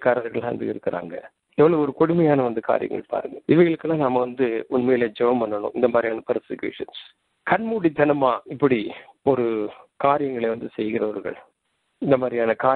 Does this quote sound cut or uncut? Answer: uncut